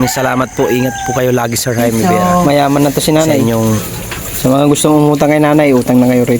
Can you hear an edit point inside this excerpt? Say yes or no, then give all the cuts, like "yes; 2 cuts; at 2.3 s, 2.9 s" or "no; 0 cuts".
yes; 2 cuts; at 2.0 s, 2.8 s